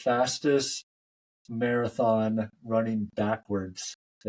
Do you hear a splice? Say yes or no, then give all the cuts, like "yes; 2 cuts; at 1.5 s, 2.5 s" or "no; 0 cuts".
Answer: no; 0 cuts